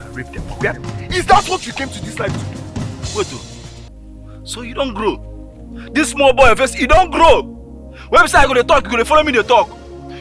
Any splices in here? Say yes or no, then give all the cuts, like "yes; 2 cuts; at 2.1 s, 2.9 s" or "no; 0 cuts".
yes; 1 cut; at 1.1 s